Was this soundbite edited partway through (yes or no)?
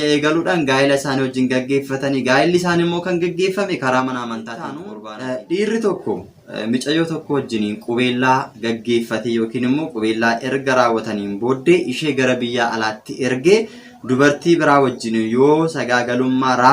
yes